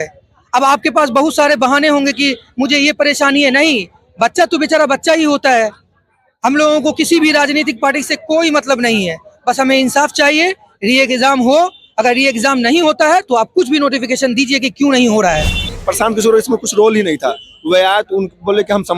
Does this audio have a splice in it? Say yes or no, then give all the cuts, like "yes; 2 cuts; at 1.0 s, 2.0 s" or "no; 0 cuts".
yes; 1 cut; at 15.8 s